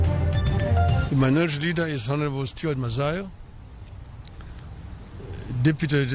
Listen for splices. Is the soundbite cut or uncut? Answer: cut